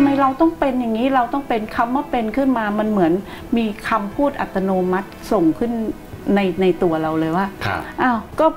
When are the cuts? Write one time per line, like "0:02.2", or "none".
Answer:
none